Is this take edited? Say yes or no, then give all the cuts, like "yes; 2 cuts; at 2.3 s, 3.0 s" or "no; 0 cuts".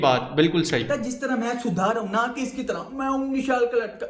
no; 0 cuts